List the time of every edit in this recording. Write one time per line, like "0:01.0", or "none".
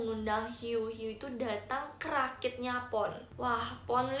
0:03.3